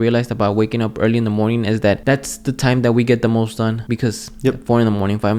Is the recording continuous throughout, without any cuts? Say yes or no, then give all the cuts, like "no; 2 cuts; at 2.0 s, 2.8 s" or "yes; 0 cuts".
no; 2 cuts; at 2.0 s, 3.8 s